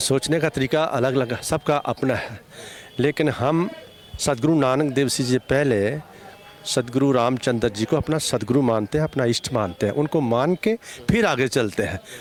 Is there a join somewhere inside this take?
no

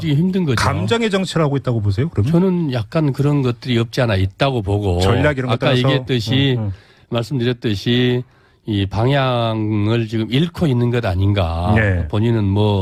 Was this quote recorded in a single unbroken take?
yes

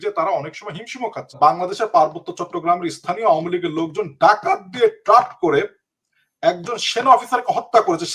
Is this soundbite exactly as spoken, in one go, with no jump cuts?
no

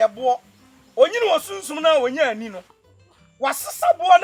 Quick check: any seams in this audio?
no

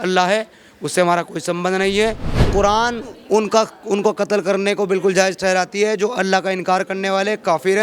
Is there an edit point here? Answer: yes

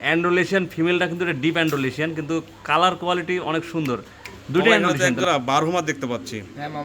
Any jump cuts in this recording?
yes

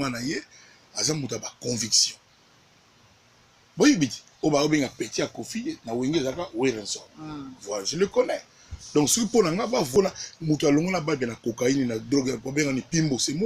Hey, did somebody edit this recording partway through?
yes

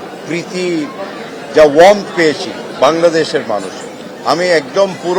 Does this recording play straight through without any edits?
yes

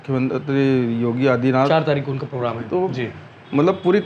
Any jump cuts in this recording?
no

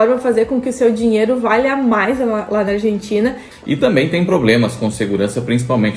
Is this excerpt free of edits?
no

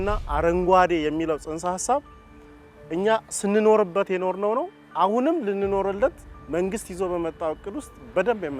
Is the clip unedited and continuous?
yes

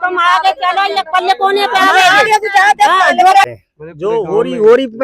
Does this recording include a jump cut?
yes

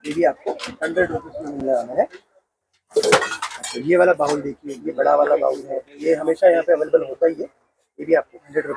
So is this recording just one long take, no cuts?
yes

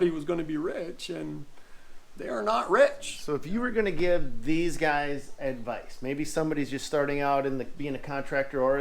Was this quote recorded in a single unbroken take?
no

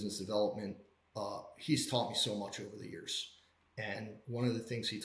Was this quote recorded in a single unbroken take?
yes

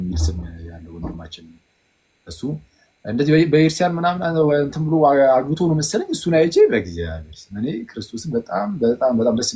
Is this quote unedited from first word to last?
yes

